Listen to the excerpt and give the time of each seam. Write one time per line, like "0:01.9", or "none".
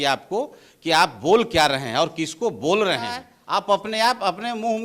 0:03.3